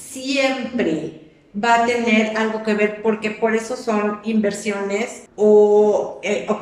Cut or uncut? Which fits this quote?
cut